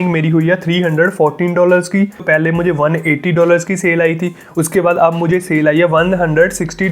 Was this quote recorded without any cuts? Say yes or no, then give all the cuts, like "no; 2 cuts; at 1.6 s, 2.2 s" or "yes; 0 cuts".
no; 1 cut; at 2.2 s